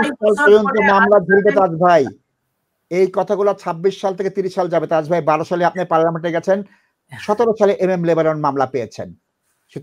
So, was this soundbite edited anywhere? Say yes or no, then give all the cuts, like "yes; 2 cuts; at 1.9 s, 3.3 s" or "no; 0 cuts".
no; 0 cuts